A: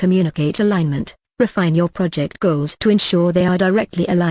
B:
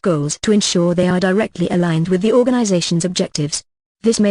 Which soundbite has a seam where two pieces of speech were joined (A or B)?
B